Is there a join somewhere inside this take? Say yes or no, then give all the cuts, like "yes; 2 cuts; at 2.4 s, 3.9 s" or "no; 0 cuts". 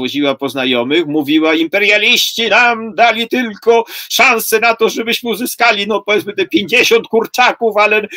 no; 0 cuts